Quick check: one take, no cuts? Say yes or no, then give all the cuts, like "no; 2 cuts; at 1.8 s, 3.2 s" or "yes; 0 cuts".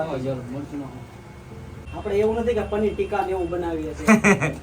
no; 1 cut; at 1.8 s